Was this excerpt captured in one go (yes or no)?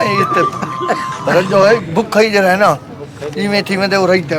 yes